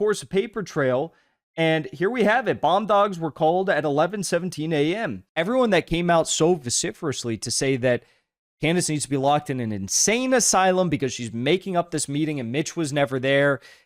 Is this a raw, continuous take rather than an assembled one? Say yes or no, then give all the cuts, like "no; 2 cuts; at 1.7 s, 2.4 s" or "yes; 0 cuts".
no; 1 cut; at 5.2 s